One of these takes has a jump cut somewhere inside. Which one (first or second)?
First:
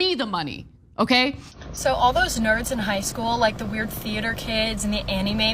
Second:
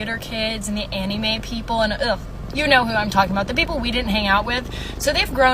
first